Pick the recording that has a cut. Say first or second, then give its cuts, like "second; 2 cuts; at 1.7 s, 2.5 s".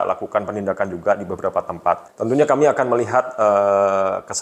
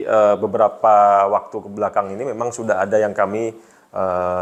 first; 1 cut; at 2.1 s